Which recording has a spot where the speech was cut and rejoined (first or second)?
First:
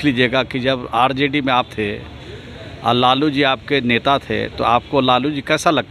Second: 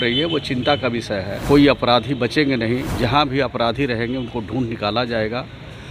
second